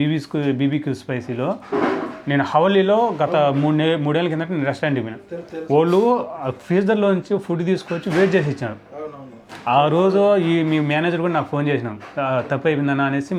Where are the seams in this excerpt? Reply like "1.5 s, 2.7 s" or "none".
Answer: none